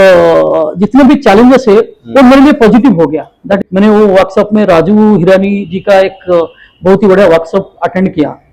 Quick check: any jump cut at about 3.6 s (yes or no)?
yes